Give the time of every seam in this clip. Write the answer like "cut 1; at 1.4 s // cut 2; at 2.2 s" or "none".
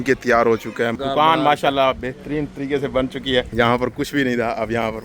cut 1; at 0.9 s // cut 2; at 3.5 s